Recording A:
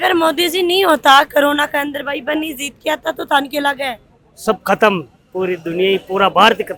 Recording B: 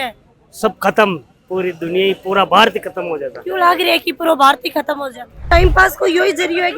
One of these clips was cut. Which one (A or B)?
B